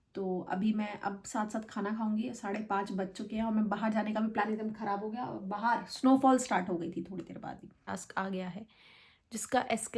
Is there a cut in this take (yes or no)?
yes